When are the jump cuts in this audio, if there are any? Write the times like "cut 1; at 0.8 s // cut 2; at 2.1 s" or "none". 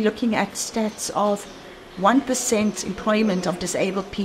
none